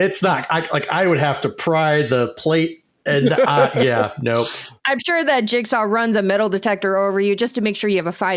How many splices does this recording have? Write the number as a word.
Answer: zero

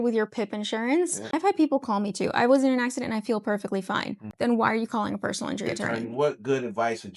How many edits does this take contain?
three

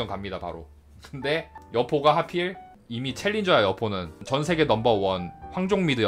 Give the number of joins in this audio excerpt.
one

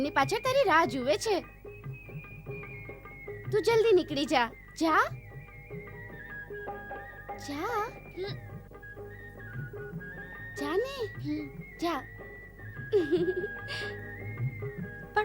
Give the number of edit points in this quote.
zero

